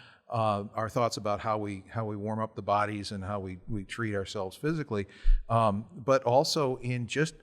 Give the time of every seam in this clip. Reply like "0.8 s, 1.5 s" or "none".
none